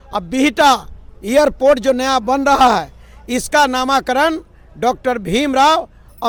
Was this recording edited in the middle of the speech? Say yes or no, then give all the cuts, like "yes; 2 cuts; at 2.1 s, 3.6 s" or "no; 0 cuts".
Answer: no; 0 cuts